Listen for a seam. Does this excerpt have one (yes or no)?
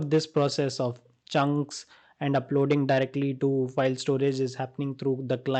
no